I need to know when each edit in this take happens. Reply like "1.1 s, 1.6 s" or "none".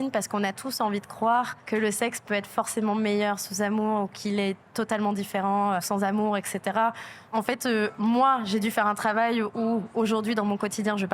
1.6 s, 5.9 s, 7.1 s